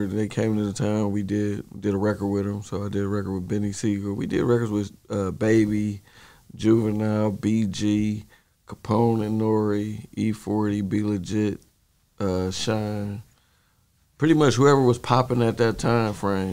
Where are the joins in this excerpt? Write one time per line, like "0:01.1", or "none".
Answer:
none